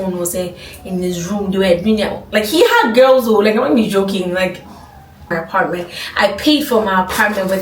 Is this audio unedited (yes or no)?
no